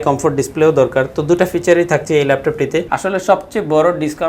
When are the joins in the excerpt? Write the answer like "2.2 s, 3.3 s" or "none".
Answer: 2.9 s